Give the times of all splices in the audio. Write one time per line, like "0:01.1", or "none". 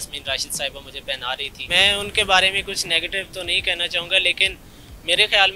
0:01.5